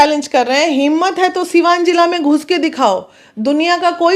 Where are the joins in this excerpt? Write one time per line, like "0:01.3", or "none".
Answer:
none